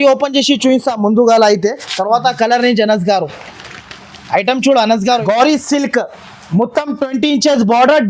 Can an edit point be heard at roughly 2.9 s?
no; 1 cut; at 5.2 s

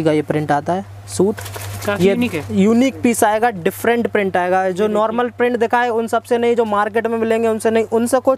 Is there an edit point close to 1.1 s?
no; 0 cuts

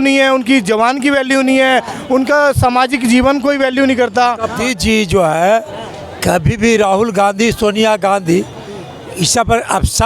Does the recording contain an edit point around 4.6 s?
yes; 1 cut; at 4.6 s

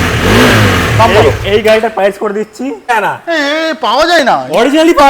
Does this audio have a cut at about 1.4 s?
no; 1 cut; at 2.9 s

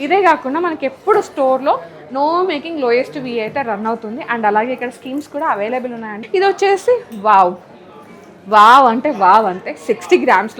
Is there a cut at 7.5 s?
no; 1 cut; at 6.1 s

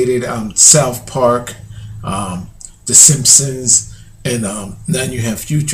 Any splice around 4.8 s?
no; 1 cut; at 1.0 s

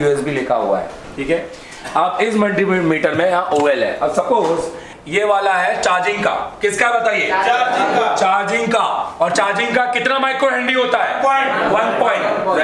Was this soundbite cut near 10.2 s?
no; 1 cut; at 4.9 s

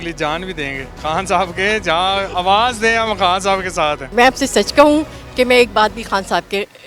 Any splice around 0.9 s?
yes; 2 cuts; at 0.9 s, 4.0 s

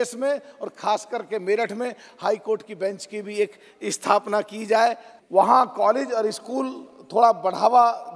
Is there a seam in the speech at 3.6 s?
no; 1 cut; at 5.1 s

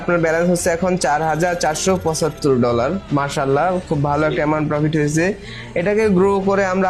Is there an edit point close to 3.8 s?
no; 0 cuts

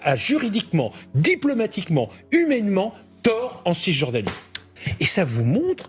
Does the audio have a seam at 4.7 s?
yes; 1 cut; at 4.7 s

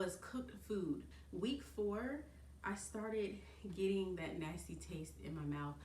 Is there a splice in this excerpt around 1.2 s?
yes; 1 cut; at 1.2 s

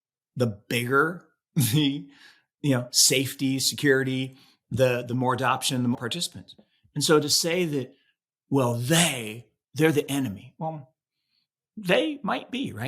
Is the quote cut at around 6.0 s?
yes; 1 cut; at 6.0 s

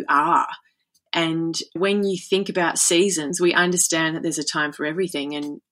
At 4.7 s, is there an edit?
no; 2 cuts; at 1.8 s, 3.3 s

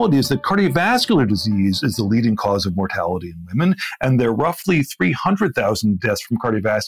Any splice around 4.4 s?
no; 0 cuts

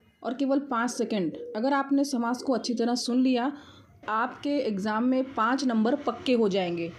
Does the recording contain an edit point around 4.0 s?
yes; 1 cut; at 4.0 s

